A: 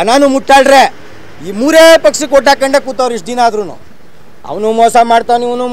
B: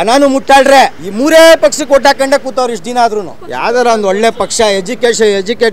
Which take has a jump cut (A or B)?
B